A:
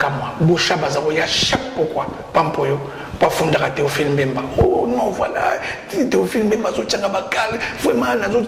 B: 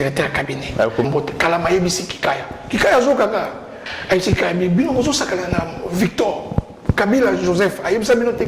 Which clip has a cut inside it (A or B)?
B